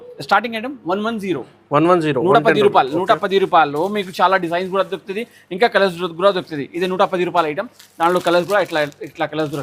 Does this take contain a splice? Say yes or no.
no